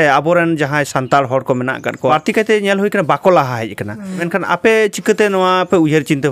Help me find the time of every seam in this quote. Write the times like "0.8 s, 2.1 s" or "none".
2.1 s, 4.2 s